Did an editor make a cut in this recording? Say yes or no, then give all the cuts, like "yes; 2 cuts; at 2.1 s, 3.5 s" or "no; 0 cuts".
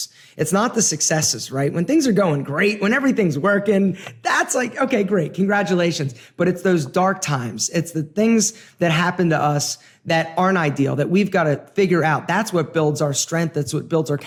no; 0 cuts